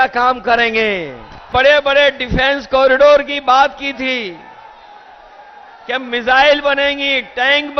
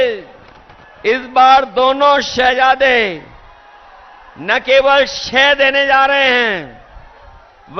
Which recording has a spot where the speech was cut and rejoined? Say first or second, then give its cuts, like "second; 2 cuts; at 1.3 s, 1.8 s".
first; 1 cut; at 1.5 s